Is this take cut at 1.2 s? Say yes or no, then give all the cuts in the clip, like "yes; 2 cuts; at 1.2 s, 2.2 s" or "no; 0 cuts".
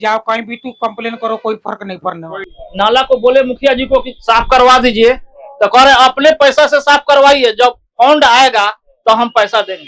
no; 1 cut; at 2.4 s